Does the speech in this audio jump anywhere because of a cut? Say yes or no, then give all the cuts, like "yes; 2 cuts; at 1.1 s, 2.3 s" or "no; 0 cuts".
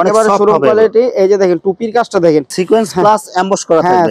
yes; 1 cut; at 2.5 s